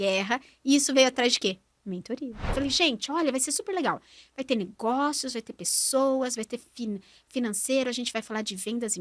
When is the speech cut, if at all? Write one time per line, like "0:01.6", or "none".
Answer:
0:02.5